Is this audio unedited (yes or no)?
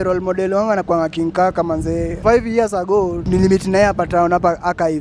no